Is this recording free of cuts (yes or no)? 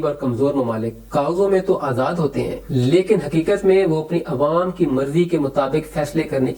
yes